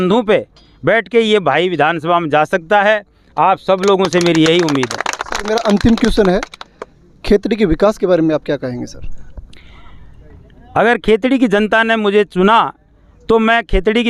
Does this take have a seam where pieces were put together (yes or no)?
no